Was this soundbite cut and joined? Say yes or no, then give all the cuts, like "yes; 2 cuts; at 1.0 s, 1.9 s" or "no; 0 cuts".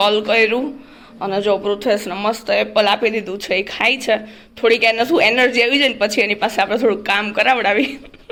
no; 0 cuts